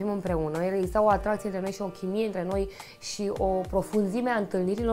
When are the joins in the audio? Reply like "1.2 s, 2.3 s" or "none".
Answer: none